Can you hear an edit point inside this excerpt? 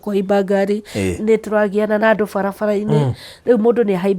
yes; 1 cut; at 3.3 s

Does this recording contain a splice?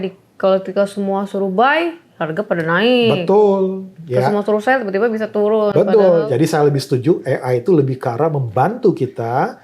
yes; 1 cut; at 6.2 s

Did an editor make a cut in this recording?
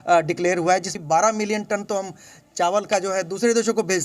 yes; 1 cut; at 0.9 s

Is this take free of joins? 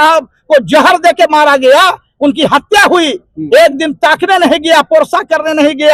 yes; 0 cuts

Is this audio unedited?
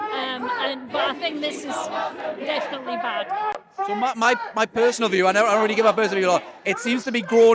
yes; 0 cuts

